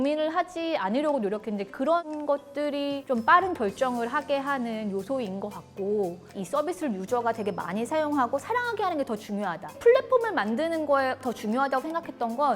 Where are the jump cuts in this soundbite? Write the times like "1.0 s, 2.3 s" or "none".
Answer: 3.0 s, 6.4 s, 9.7 s